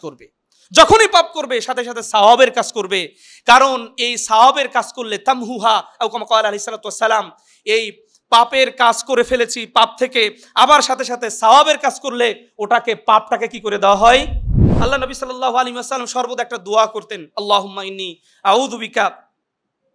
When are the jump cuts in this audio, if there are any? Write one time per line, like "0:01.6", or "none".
0:14.6

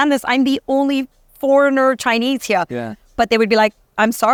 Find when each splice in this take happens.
none

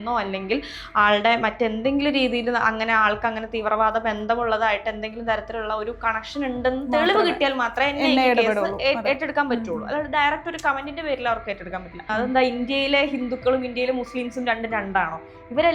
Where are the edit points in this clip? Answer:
0:12.1

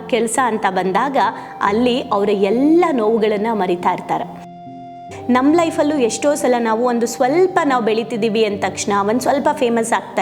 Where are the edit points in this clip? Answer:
0:04.9

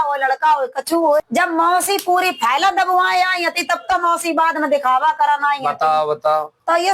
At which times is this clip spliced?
0:01.2

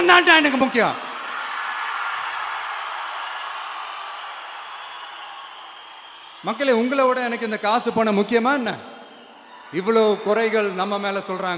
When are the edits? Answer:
none

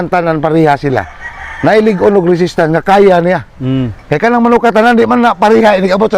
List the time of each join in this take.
none

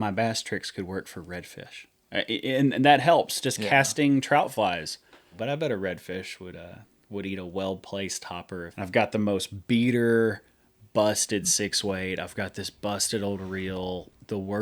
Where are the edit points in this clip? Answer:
0:05.4
0:08.7

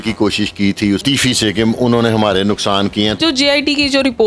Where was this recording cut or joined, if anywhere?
0:03.2

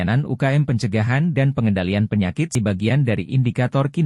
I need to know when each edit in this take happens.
0:02.6

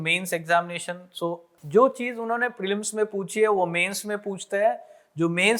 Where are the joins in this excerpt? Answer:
0:01.5

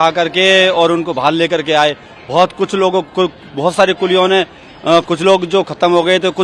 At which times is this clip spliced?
none

